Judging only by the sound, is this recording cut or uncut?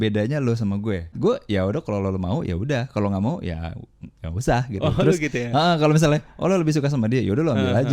cut